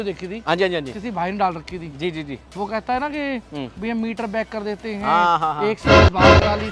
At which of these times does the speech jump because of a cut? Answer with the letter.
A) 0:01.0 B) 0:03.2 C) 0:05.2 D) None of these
D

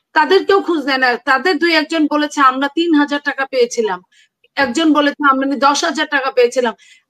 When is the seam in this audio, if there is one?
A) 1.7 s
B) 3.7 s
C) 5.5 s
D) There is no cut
D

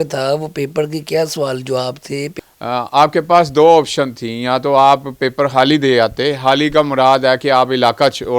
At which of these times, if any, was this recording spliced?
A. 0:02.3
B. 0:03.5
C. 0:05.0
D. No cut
A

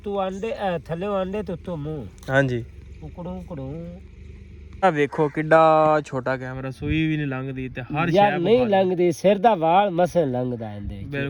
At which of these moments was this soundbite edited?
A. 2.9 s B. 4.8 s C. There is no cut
B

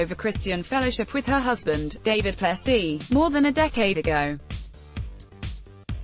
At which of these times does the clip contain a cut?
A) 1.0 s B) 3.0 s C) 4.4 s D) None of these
C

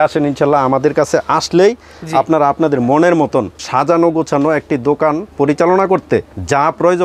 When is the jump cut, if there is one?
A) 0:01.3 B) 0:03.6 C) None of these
B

